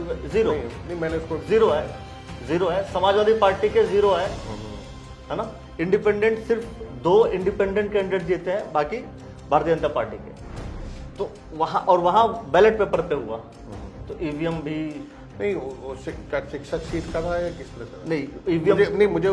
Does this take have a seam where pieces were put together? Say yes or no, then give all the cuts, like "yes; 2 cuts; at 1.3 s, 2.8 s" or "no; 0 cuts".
no; 0 cuts